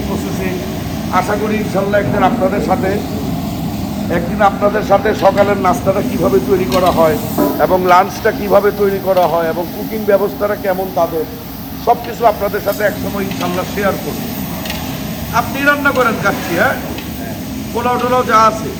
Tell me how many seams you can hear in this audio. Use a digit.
0